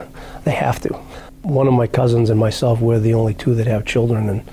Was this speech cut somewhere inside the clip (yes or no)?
no